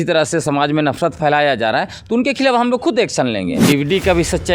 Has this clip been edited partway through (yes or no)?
yes